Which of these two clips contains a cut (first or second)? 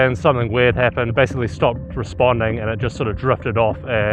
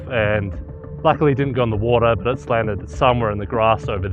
first